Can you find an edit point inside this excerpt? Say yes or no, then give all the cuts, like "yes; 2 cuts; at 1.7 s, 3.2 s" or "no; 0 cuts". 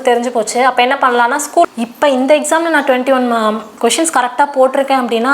yes; 1 cut; at 1.7 s